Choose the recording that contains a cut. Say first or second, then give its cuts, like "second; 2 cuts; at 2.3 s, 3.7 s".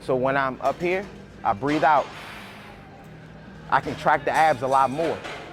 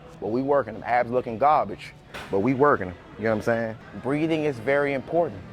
second; 1 cut; at 3.9 s